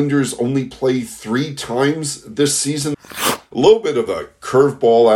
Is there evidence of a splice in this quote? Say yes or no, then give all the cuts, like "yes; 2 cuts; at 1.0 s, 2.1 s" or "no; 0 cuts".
yes; 1 cut; at 3.2 s